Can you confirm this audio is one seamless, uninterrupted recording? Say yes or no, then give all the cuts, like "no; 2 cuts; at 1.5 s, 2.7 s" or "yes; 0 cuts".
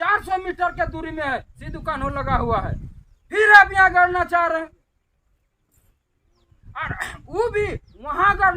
yes; 0 cuts